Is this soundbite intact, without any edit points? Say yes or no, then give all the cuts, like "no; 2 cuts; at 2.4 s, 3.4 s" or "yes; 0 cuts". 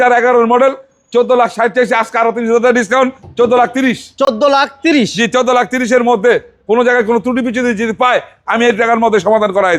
yes; 0 cuts